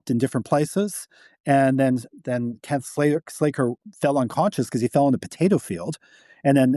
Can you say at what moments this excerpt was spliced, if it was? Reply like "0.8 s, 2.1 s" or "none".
none